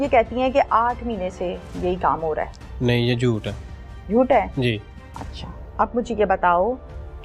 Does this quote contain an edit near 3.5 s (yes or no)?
no